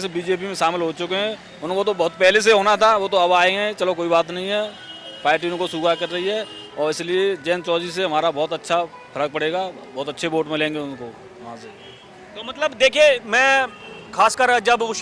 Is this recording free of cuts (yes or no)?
yes